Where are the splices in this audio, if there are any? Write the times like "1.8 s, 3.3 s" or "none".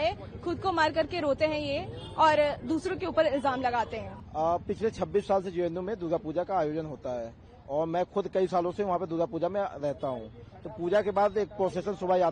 none